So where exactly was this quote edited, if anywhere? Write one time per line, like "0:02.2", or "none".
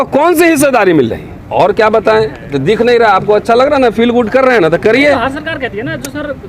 0:01.4